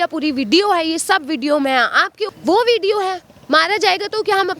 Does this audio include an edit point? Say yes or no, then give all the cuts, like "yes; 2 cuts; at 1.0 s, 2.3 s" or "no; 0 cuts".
yes; 1 cut; at 2.2 s